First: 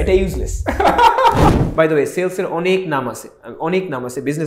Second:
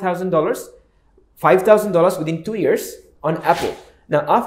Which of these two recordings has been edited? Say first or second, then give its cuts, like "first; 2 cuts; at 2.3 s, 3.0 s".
first; 1 cut; at 1.6 s